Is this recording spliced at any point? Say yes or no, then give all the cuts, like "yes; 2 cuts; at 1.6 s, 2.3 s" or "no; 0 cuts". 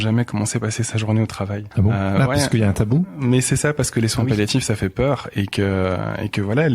yes; 1 cut; at 1.6 s